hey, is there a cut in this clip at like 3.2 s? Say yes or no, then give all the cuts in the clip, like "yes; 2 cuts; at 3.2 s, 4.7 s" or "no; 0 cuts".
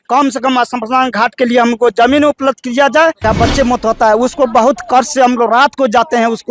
yes; 1 cut; at 3.2 s